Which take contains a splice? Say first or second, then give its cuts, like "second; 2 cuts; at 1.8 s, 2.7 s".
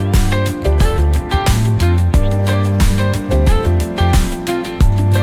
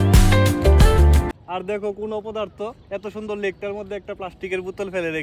second; 1 cut; at 1.3 s